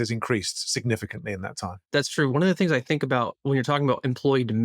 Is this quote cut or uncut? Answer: cut